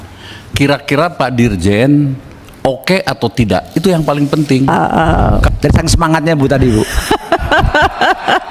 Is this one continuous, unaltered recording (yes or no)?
no